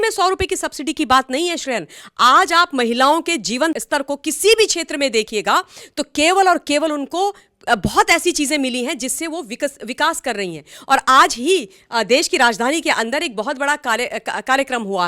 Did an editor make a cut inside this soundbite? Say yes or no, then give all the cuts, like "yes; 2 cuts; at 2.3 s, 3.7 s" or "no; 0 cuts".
yes; 1 cut; at 3.8 s